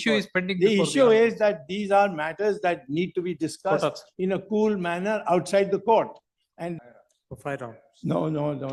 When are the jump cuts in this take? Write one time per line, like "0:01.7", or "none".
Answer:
0:06.7